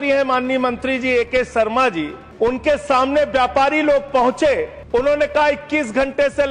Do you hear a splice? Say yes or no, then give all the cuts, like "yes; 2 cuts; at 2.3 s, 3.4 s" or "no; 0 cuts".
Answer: yes; 2 cuts; at 2.2 s, 4.8 s